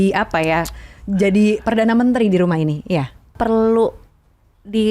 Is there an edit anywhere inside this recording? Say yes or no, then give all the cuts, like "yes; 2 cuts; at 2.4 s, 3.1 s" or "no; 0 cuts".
yes; 1 cut; at 3.3 s